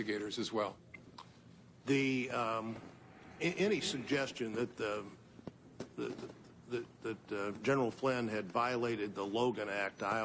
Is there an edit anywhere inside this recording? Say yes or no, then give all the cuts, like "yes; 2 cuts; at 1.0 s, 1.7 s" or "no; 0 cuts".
yes; 1 cut; at 5.7 s